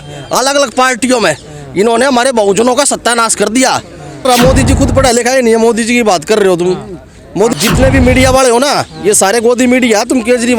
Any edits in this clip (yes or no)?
yes